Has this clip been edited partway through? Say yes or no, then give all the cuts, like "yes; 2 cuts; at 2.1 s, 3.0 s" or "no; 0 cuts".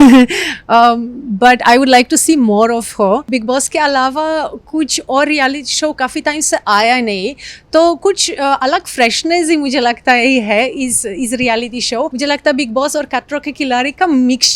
yes; 2 cuts; at 3.3 s, 12.1 s